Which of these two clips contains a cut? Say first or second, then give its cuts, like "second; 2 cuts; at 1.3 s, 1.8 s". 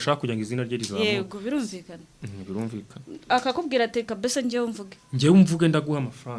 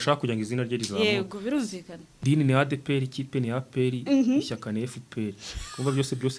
second; 1 cut; at 2.1 s